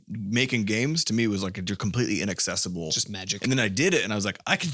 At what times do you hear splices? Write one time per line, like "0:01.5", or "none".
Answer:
0:03.3